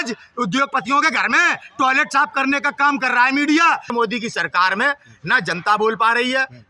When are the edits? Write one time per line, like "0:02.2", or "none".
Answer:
0:03.9